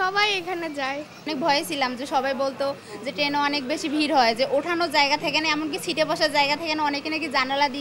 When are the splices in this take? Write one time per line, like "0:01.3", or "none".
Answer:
0:01.2

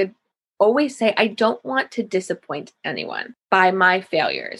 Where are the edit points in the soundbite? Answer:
0:03.3

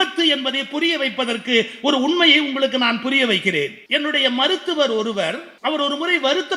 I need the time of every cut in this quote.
0:03.8
0:05.5

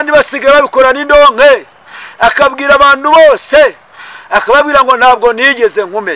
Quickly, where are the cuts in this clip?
none

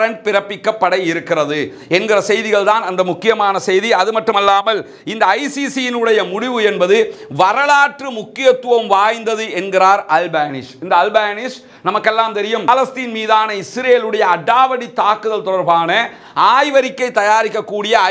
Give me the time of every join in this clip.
none

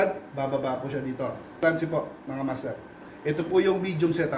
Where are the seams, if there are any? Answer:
0:01.5

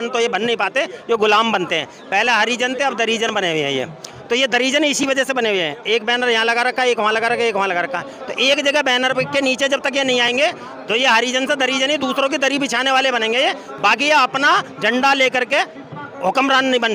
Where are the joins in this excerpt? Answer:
none

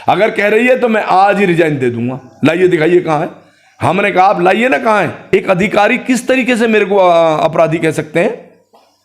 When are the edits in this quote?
0:05.2

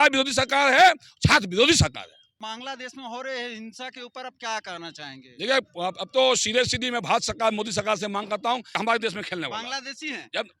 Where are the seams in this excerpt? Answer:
0:02.3
0:08.8

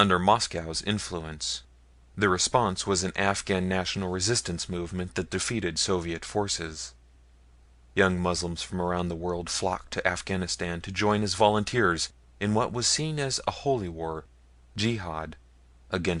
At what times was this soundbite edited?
0:02.4

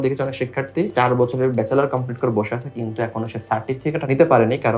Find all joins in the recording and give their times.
0:00.9
0:04.0

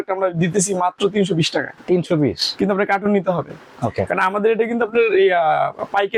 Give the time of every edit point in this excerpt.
none

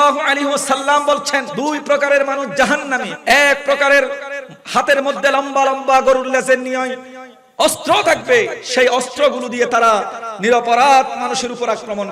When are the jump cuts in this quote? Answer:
0:01.5
0:03.0

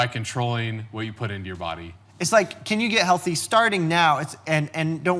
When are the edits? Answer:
0:02.0

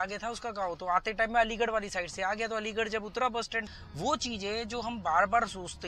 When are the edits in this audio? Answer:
0:03.7

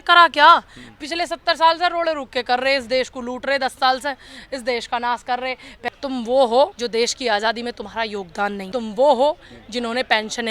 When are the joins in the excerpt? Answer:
0:05.7
0:06.7
0:08.6

